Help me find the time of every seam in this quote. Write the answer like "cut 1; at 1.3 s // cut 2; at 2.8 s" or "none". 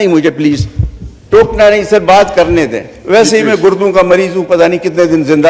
none